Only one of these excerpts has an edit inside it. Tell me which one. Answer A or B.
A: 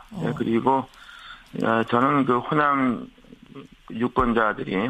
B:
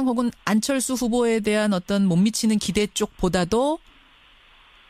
A